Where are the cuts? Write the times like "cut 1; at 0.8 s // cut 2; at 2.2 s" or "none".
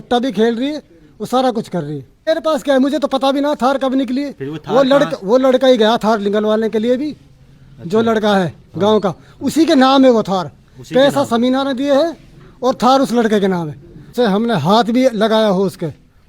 cut 1; at 2.3 s // cut 2; at 14.1 s